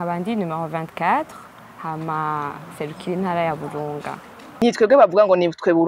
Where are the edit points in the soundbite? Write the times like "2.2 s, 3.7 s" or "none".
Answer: 4.6 s